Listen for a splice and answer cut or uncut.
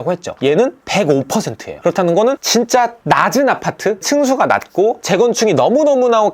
uncut